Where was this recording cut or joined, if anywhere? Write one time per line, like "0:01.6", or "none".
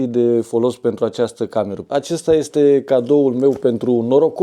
0:01.8